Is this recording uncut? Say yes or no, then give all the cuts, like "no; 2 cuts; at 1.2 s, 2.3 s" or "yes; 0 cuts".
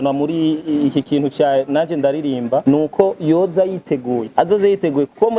no; 2 cuts; at 2.6 s, 4.3 s